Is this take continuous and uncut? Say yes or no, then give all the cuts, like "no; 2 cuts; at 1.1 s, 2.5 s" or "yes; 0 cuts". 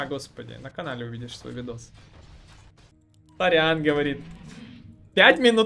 no; 1 cut; at 2.9 s